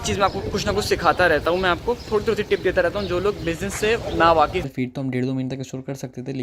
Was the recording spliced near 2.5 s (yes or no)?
no